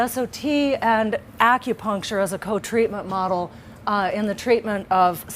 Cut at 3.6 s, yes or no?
yes